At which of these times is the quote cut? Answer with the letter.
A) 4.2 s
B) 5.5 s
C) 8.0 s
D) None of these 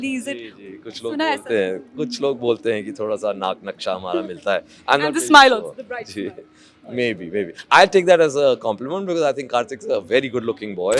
D